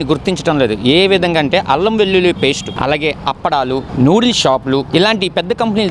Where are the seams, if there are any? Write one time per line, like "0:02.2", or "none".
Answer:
0:02.7
0:03.9